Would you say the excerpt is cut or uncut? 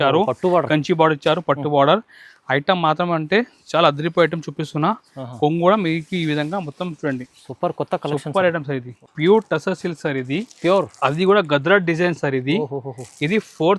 cut